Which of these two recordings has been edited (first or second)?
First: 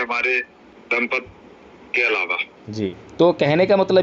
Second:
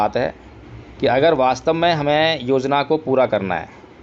first